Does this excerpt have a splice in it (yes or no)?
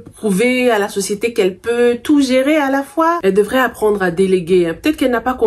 no